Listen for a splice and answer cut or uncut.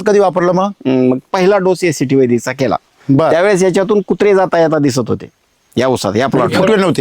cut